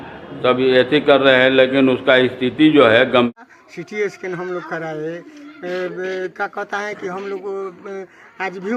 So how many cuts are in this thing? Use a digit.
1